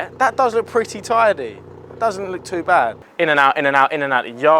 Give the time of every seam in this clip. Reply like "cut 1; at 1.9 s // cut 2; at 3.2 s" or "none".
cut 1; at 3.0 s